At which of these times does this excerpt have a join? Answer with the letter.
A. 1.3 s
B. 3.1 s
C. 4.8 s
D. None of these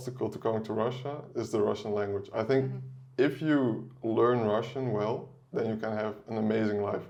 D